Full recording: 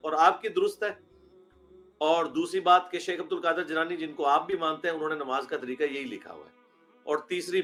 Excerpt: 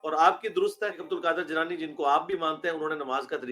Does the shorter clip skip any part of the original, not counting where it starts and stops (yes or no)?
yes